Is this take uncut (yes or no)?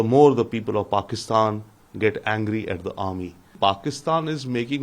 no